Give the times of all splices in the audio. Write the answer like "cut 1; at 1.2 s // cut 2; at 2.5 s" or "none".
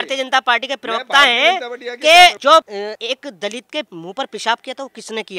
cut 1; at 2.8 s // cut 2; at 3.9 s